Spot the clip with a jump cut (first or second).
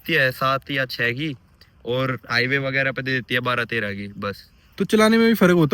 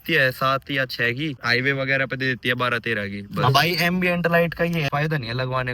second